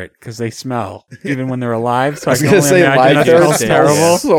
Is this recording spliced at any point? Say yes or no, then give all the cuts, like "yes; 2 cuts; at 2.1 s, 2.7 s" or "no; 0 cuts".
yes; 1 cut; at 1.1 s